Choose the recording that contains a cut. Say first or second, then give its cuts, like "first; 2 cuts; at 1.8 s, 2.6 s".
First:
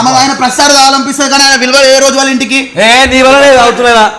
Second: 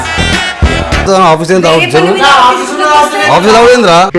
second; 1 cut; at 1.0 s